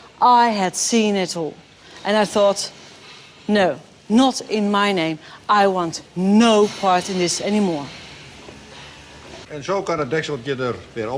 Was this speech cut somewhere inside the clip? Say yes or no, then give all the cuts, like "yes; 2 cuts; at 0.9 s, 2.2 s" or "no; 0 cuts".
no; 0 cuts